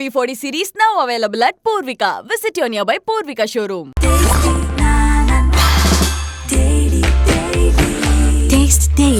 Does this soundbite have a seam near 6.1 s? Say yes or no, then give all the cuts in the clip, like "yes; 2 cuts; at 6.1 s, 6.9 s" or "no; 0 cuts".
no; 0 cuts